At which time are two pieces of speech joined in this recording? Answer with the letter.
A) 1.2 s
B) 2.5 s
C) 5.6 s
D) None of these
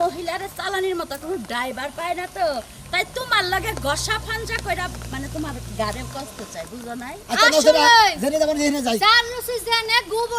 D